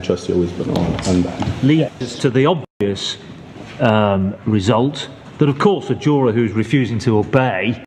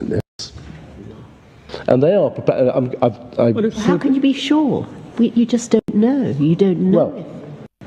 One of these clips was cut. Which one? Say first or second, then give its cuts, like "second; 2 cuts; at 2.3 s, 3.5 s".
first; 1 cut; at 1.4 s